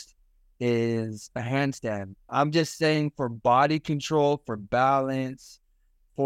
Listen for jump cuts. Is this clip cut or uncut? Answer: cut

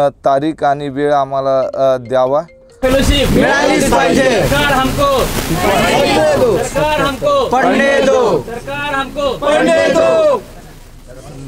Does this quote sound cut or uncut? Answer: cut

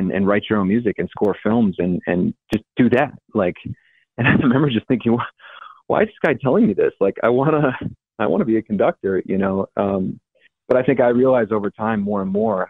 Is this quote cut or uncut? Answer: uncut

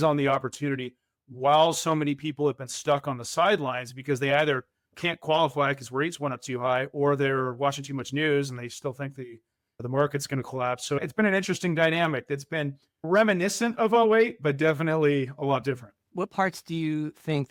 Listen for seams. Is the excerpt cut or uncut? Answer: uncut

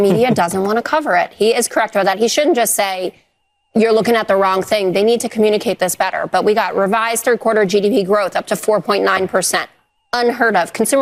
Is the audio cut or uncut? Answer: uncut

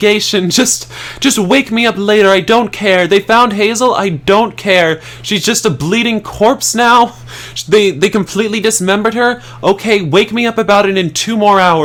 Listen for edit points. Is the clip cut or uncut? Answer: uncut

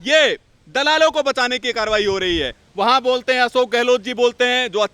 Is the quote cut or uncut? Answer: cut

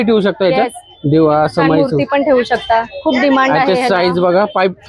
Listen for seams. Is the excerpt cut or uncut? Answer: uncut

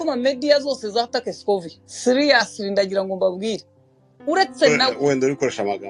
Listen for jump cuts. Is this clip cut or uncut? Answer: cut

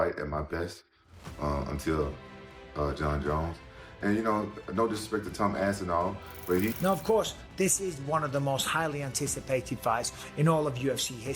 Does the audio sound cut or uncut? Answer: cut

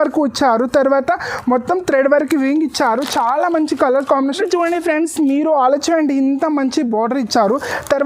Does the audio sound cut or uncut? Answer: cut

